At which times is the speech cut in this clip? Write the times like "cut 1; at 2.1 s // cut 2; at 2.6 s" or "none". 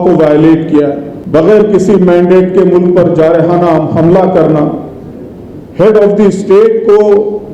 cut 1; at 1.1 s